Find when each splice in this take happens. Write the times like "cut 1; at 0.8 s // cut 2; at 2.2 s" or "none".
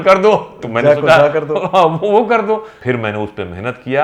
none